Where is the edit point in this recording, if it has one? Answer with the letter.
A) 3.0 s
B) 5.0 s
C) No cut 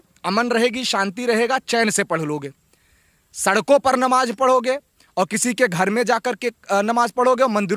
C